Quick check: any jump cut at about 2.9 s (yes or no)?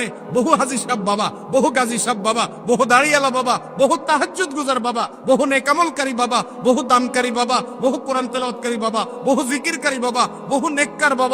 no